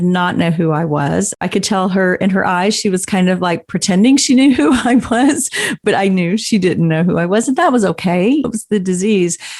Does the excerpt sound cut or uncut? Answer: cut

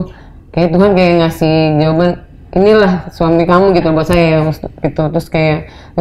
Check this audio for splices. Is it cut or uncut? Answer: uncut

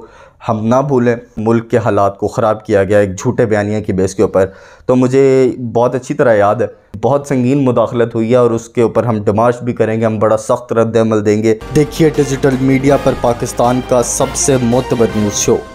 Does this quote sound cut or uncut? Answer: cut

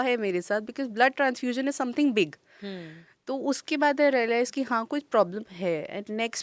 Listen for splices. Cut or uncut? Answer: uncut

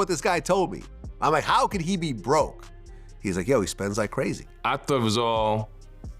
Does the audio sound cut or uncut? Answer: cut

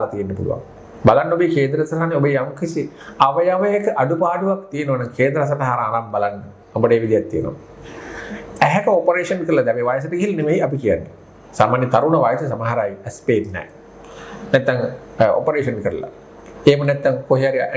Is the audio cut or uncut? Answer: uncut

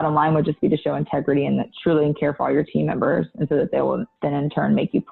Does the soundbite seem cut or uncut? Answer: uncut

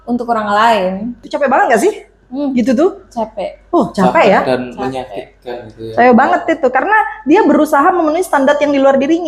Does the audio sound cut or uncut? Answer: cut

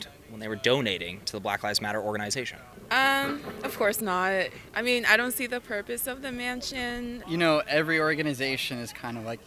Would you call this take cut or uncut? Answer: cut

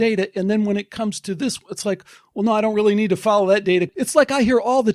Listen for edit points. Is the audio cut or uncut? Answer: cut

